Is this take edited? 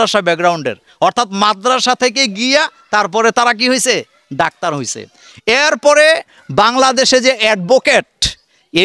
no; 0 cuts

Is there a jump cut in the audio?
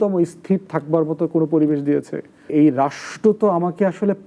yes; 1 cut; at 2.5 s

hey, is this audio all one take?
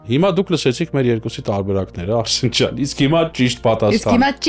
yes; 0 cuts

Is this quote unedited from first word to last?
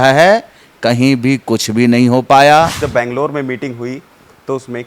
no; 1 cut; at 2.8 s

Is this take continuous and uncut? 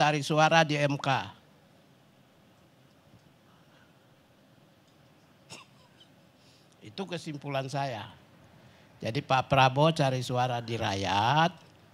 yes; 0 cuts

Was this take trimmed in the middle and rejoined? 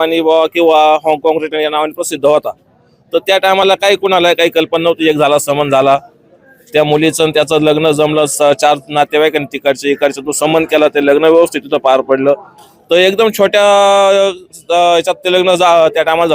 no; 0 cuts

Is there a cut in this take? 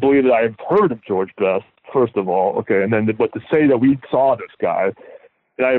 no; 0 cuts

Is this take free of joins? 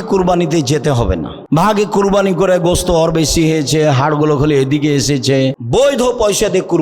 no; 2 cuts; at 1.3 s, 5.6 s

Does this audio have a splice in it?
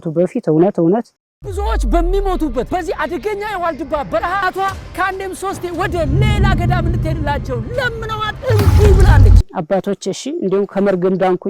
no; 0 cuts

